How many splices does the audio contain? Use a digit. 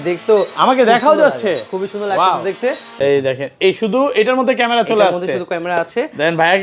1